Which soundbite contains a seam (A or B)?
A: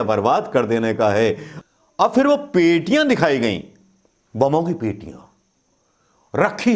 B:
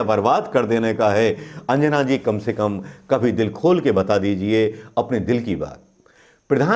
A